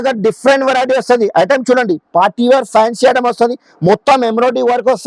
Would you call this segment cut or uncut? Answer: uncut